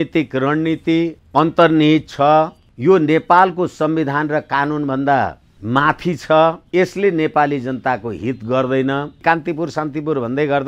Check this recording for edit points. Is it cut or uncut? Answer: cut